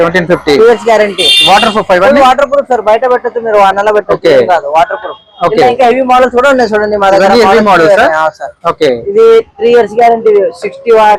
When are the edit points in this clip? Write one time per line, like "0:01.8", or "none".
none